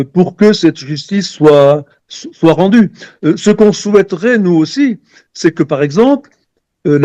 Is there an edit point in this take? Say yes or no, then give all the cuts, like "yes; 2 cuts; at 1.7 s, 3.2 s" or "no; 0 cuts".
no; 0 cuts